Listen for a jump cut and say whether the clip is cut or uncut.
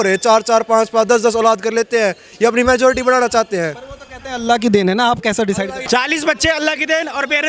uncut